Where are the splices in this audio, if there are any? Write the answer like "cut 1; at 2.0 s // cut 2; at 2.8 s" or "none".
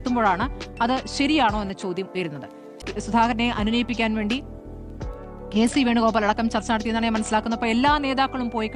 cut 1; at 2.8 s

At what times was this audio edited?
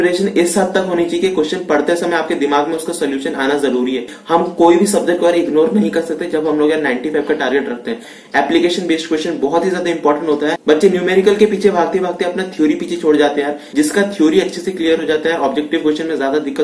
cut 1; at 4.1 s // cut 2; at 8.1 s // cut 3; at 10.6 s // cut 4; at 13.6 s

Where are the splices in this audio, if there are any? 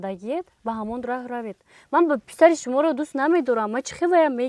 none

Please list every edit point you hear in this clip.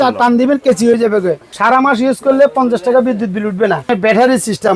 cut 1; at 1.5 s // cut 2; at 3.9 s

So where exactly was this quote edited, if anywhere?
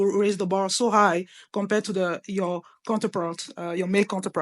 none

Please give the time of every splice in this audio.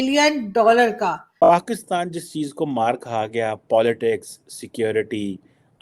cut 1; at 1.3 s

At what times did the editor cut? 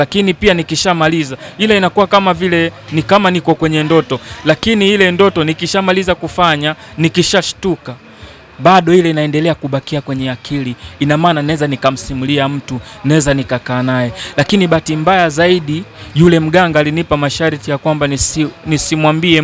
none

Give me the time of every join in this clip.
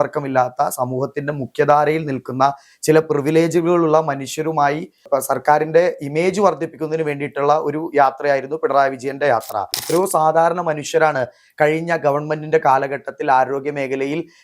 cut 1; at 5.1 s // cut 2; at 9.8 s

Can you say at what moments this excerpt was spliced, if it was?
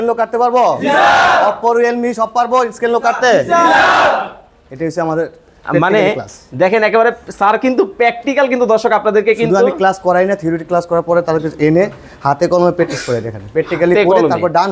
none

